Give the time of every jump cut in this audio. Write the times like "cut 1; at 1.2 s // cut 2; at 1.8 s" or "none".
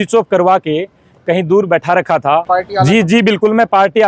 cut 1; at 2.4 s